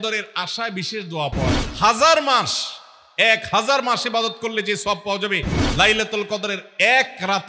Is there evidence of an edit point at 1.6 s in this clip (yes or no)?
yes